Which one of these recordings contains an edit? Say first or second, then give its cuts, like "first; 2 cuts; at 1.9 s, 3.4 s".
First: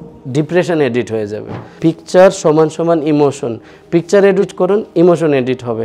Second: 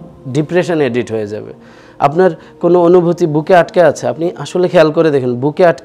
first; 2 cuts; at 1.6 s, 4.5 s